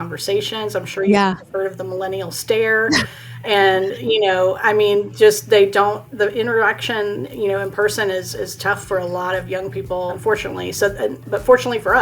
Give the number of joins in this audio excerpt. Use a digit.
2